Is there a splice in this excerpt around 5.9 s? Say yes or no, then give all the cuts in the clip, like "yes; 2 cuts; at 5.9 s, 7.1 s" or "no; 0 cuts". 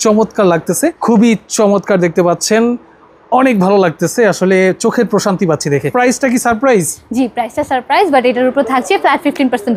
yes; 2 cuts; at 1.0 s, 5.9 s